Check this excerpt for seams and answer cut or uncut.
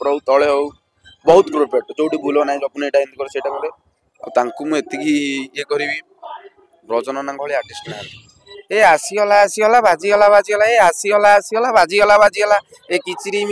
cut